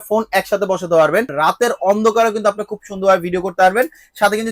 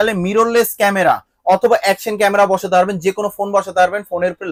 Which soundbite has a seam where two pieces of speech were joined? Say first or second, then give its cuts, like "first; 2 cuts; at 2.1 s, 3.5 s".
first; 1 cut; at 1.3 s